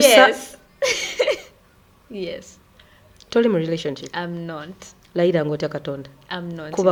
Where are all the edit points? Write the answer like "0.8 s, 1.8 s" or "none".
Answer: none